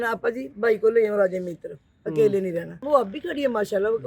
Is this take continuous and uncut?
no; 1 cut; at 2.9 s

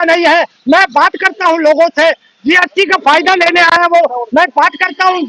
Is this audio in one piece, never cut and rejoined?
yes; 0 cuts

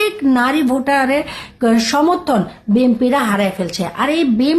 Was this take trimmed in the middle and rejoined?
no; 0 cuts

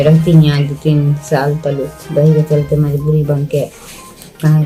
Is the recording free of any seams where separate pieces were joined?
yes; 0 cuts

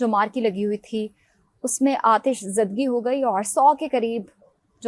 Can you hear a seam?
no; 0 cuts

